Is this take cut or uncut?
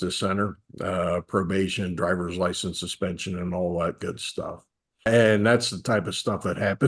cut